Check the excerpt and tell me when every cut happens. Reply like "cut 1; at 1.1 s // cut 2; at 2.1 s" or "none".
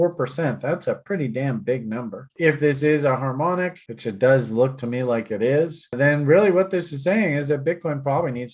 cut 1; at 2.3 s